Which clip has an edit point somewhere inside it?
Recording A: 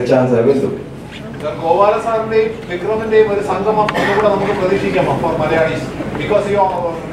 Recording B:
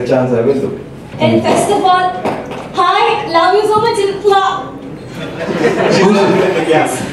B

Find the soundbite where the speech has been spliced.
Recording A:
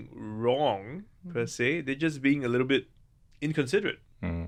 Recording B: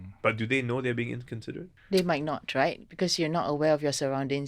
B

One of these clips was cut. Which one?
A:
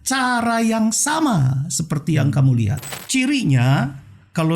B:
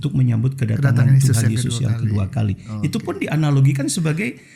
A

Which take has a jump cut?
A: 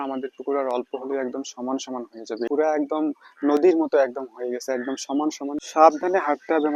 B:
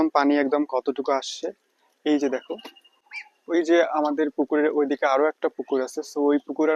A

